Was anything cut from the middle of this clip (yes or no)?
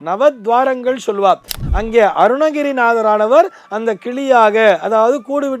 yes